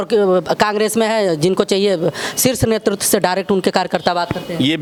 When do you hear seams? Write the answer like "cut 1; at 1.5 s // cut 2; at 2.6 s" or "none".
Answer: none